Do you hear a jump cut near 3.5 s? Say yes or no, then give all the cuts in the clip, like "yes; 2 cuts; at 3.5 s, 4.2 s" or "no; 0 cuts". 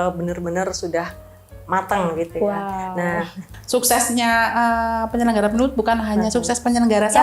yes; 1 cut; at 3.5 s